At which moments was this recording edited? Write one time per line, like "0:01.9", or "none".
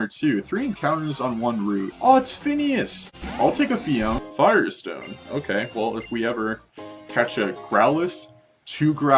0:01.9
0:03.1
0:04.3